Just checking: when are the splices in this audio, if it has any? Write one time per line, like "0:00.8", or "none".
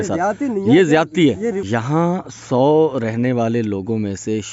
0:01.6